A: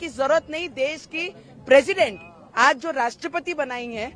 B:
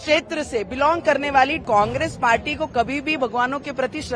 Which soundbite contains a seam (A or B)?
B